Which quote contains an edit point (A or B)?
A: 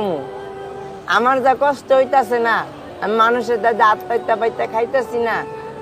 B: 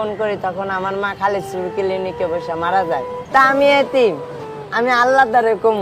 B